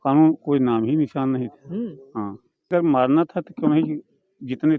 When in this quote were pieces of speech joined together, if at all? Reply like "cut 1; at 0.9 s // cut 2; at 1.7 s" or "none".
cut 1; at 2.7 s

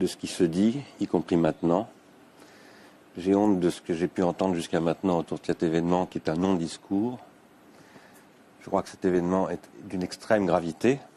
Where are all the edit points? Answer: cut 1; at 3.8 s

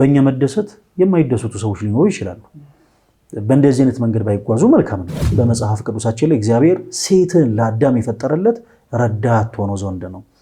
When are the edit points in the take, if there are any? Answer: cut 1; at 5.3 s

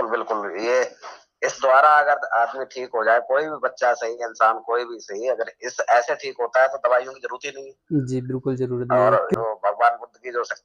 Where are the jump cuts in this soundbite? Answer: cut 1; at 9.3 s

